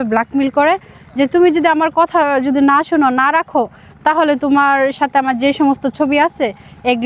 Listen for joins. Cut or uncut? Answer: uncut